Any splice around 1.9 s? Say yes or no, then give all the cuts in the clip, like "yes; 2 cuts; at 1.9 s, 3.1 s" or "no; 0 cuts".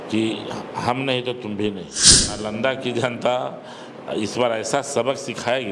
yes; 1 cut; at 1.9 s